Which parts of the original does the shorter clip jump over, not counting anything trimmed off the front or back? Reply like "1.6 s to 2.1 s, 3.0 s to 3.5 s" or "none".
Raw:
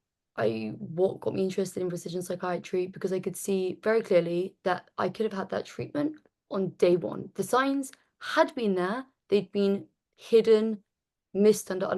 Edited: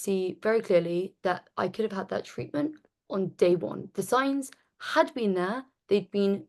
none